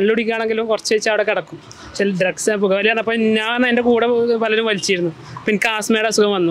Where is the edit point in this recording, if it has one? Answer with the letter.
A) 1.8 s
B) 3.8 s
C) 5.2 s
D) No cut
D